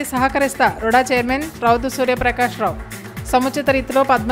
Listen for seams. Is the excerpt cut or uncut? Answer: uncut